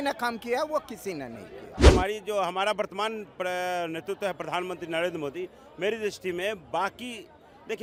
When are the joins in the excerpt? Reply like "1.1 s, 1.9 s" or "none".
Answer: none